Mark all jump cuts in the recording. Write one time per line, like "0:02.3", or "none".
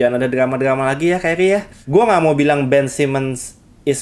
0:01.8